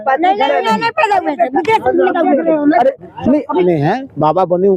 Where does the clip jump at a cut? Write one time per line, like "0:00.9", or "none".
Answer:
0:03.5